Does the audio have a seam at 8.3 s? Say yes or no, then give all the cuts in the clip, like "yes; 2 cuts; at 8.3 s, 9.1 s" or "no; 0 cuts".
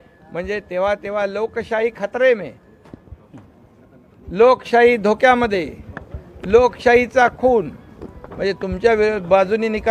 no; 0 cuts